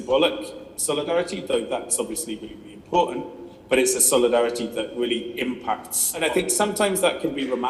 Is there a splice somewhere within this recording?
yes; 1 cut; at 6.2 s

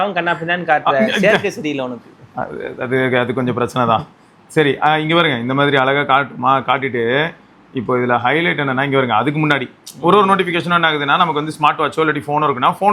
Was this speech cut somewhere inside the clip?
no; 0 cuts

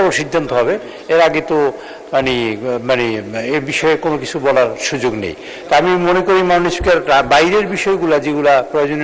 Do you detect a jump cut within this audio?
no; 0 cuts

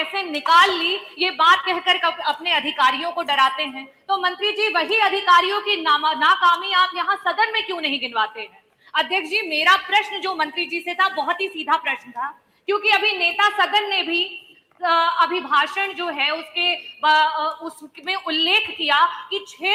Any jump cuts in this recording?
no; 0 cuts

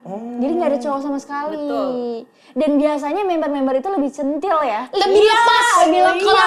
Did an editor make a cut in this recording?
no; 0 cuts

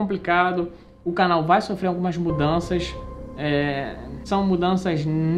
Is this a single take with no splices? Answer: no; 1 cut; at 4.2 s

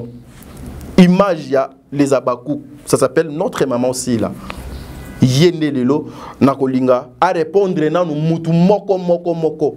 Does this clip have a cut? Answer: no; 0 cuts

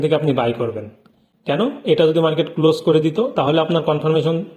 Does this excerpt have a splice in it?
no; 0 cuts

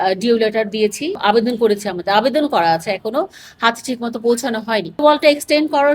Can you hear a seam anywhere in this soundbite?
yes; 2 cuts; at 1.2 s, 5.0 s

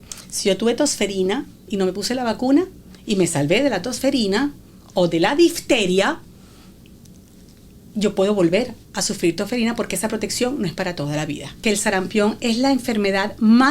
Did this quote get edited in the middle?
yes; 1 cut; at 11.5 s

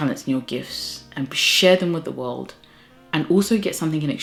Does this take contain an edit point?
no; 0 cuts

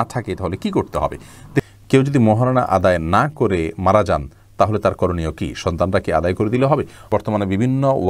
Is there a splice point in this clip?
yes; 2 cuts; at 1.6 s, 7.0 s

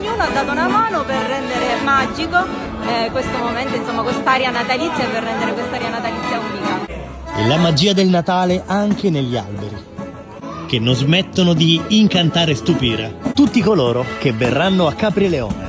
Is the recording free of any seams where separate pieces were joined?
no; 2 cuts; at 10.4 s, 13.2 s

